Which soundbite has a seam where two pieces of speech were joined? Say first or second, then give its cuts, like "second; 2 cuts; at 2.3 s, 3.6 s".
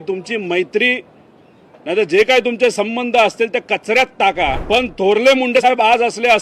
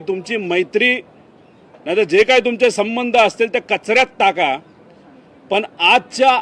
first; 1 cut; at 4.6 s